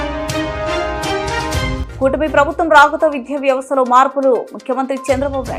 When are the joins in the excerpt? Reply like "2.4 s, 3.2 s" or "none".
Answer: none